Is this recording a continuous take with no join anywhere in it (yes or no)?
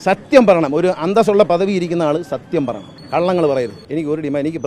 no